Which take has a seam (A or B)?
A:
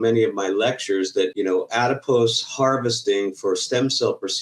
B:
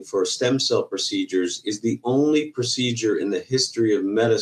A